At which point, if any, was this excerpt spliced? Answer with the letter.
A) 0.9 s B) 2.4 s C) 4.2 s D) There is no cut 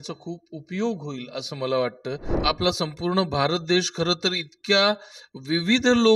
B